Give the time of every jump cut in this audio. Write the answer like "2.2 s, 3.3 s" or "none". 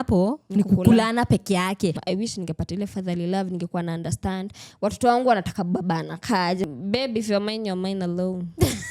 2.0 s, 6.6 s